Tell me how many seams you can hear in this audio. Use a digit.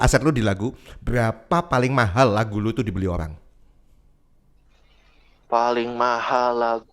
0